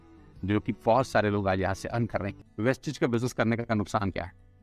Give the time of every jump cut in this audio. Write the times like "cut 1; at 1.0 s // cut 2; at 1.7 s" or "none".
cut 1; at 2.3 s